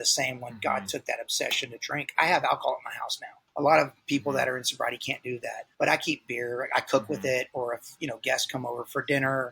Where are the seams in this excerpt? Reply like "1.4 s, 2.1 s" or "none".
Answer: 3.4 s, 5.6 s